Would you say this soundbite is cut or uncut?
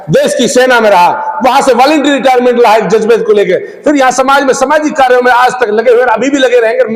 uncut